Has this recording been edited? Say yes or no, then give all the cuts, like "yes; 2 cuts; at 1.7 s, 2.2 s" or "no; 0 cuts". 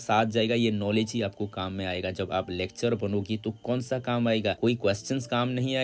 no; 0 cuts